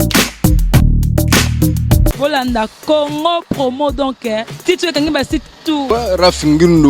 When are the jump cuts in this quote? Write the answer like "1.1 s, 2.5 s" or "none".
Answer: 2.2 s, 5.8 s